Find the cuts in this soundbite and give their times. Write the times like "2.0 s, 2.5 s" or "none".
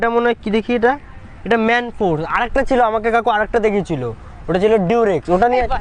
none